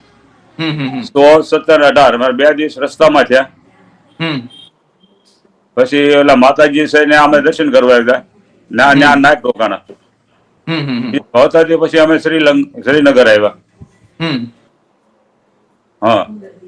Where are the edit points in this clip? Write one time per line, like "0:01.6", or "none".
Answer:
none